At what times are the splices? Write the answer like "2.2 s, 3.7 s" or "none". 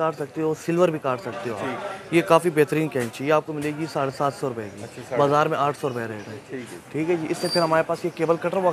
none

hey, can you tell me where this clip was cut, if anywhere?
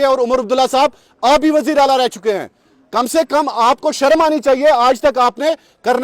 none

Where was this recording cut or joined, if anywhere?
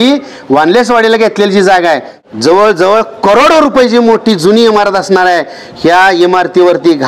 2.1 s

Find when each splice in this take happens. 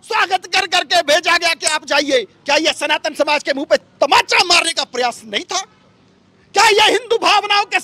none

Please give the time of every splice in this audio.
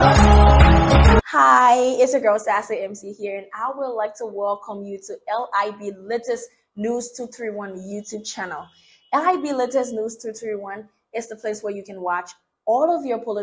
1.2 s

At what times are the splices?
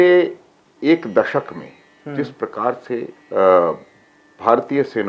3.2 s

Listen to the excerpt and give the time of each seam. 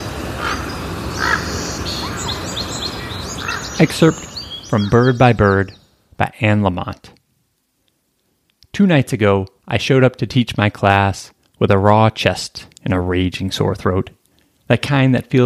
3.7 s

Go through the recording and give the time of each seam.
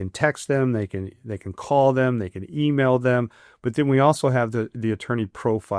none

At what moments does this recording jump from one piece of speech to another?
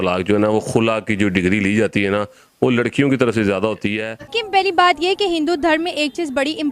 4.2 s

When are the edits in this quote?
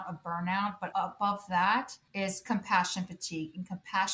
0.9 s, 2.0 s

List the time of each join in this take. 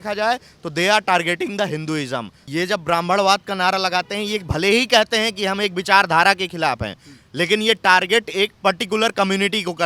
2.4 s

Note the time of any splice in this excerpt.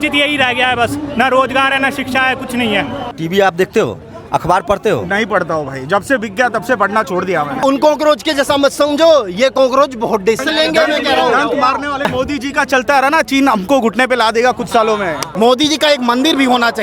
3.1 s, 7.6 s, 10.5 s, 12.1 s, 15.3 s

